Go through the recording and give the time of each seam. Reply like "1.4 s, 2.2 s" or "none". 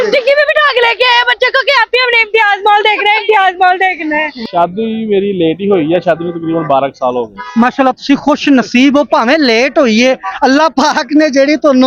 4.3 s